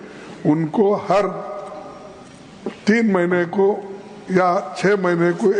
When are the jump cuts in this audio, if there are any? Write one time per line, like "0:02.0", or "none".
none